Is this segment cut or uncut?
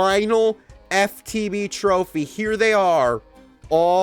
uncut